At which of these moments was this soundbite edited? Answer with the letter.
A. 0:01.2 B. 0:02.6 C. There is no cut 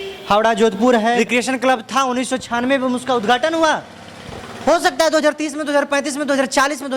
A